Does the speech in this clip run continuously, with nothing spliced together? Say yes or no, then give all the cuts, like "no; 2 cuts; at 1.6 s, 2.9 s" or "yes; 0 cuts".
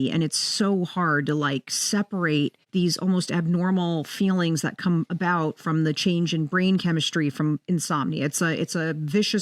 yes; 0 cuts